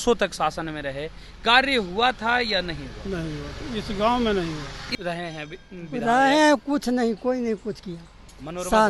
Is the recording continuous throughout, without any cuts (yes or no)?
no